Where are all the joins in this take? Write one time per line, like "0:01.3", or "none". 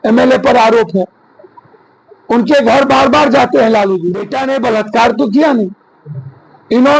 0:04.3